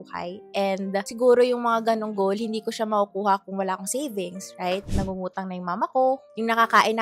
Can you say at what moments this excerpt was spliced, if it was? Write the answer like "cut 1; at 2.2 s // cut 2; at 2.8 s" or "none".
cut 1; at 4.9 s